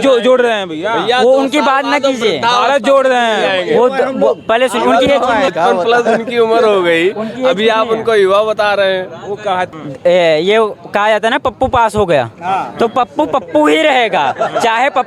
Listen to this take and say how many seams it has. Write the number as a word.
two